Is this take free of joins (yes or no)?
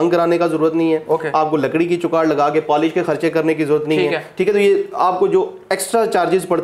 yes